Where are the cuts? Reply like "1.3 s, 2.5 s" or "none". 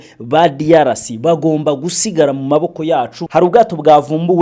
3.2 s